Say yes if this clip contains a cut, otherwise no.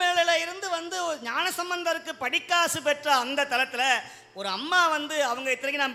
no